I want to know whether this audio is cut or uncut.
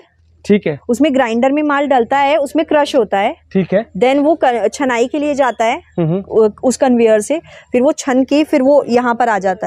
uncut